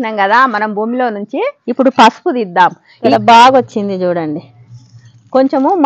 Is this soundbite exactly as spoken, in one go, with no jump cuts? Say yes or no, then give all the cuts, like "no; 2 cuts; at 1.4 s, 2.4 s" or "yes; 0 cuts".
no; 1 cut; at 2.9 s